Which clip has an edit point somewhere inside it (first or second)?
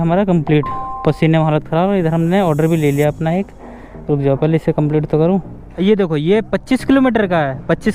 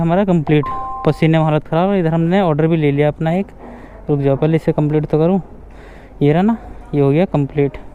first